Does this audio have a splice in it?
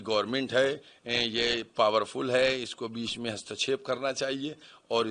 no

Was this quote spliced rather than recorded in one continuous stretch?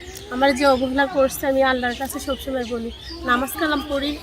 no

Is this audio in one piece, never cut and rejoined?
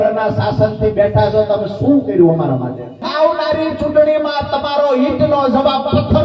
no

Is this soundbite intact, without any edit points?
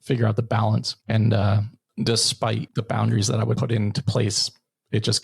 no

